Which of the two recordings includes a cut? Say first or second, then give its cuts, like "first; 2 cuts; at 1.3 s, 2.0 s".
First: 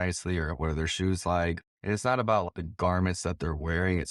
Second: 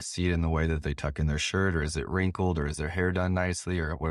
first; 2 cuts; at 1.6 s, 2.5 s